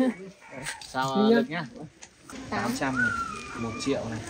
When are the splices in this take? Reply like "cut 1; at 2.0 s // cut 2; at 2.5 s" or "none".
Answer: cut 1; at 2.5 s